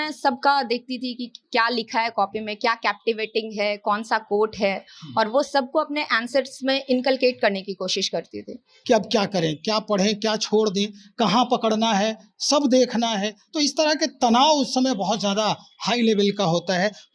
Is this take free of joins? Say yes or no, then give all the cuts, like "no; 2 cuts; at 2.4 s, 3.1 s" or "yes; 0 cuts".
no; 1 cut; at 8.7 s